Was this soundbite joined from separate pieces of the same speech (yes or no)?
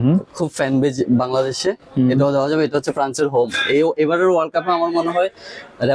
no